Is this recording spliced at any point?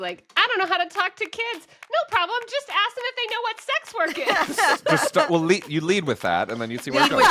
no; 0 cuts

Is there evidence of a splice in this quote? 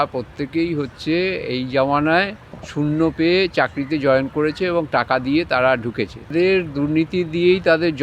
yes; 1 cut; at 6.3 s

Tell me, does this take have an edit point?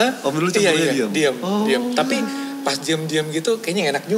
no; 0 cuts

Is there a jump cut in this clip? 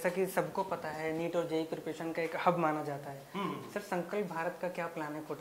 no; 0 cuts

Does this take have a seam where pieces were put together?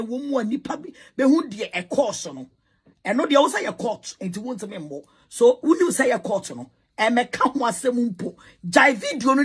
no; 0 cuts

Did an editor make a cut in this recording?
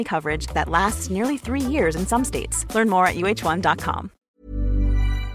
no; 0 cuts

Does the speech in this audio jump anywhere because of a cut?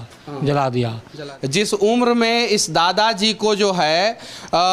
yes; 1 cut; at 1.3 s

